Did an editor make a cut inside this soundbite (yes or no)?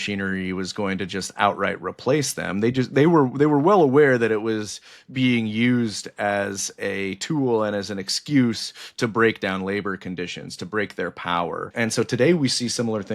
yes